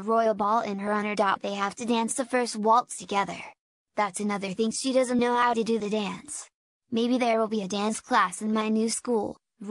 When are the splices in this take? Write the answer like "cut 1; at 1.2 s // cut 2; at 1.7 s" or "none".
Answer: cut 1; at 7.0 s

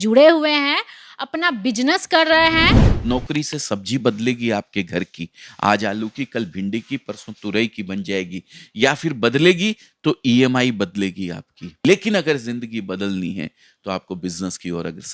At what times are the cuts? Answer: cut 1; at 2.7 s // cut 2; at 11.8 s

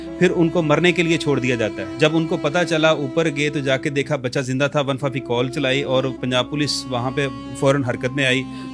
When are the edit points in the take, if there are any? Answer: cut 1; at 1.8 s

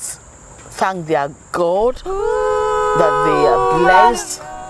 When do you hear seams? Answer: none

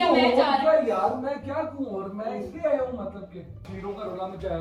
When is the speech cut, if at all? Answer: cut 1; at 3.7 s

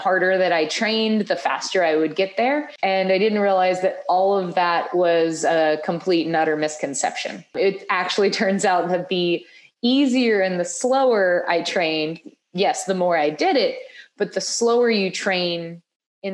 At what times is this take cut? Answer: cut 1; at 2.7 s // cut 2; at 7.5 s

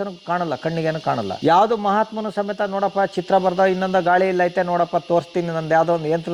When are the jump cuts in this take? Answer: cut 1; at 1.3 s

